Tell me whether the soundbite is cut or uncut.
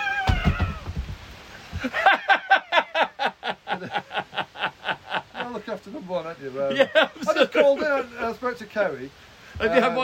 uncut